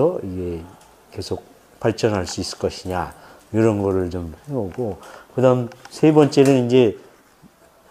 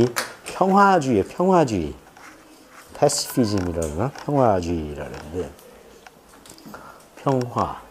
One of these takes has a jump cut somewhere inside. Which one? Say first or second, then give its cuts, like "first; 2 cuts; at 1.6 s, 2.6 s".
first; 1 cut; at 2.2 s